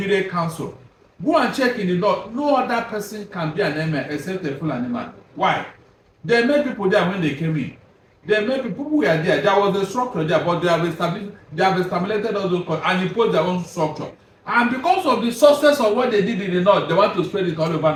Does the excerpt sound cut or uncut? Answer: uncut